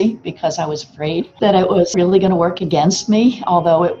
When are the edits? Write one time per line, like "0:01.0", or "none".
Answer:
none